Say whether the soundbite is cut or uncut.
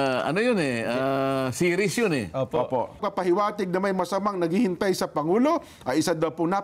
cut